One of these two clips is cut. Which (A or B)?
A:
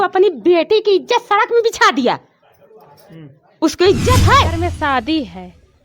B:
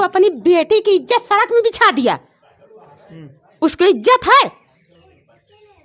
A